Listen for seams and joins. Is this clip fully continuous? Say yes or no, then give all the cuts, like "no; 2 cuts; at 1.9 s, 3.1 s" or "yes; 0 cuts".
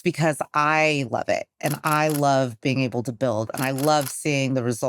yes; 0 cuts